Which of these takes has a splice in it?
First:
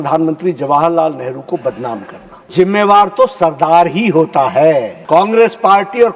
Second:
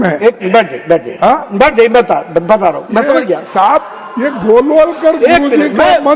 first; 2 cuts; at 2.5 s, 5.0 s

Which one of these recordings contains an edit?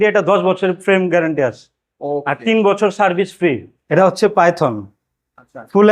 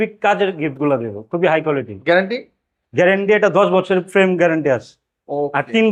first; 1 cut; at 3.8 s

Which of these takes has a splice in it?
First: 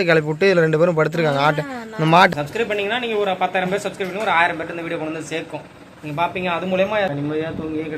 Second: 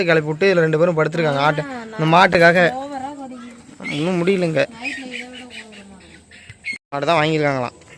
first; 2 cuts; at 2.3 s, 7.1 s

